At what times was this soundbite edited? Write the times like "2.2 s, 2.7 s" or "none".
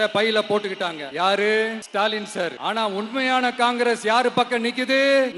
none